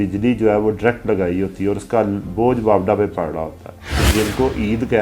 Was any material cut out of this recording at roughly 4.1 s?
yes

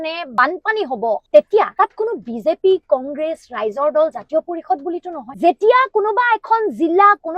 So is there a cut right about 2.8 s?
no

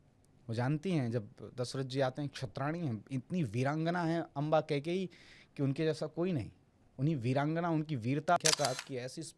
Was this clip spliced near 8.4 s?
yes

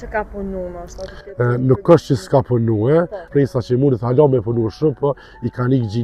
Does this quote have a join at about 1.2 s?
no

